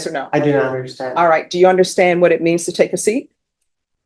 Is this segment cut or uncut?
uncut